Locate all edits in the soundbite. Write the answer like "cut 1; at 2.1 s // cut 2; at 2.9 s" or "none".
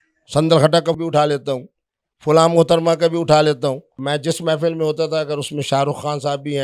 cut 1; at 1.0 s // cut 2; at 3.9 s